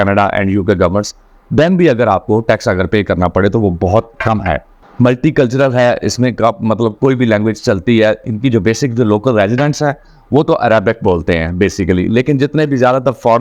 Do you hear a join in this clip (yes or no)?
yes